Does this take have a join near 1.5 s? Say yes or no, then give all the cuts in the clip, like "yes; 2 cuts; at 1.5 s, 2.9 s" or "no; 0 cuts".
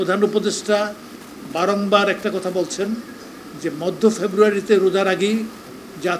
no; 0 cuts